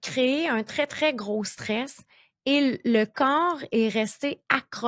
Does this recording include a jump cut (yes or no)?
no